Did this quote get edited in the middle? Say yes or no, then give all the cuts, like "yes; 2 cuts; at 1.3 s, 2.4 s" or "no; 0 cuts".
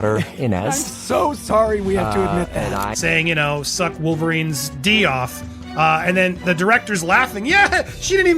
yes; 1 cut; at 3.0 s